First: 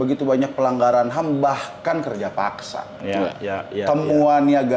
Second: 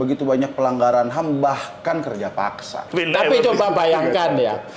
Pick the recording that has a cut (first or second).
second